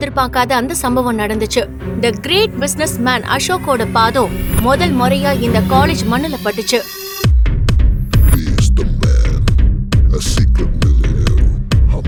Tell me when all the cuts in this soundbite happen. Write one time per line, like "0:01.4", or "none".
none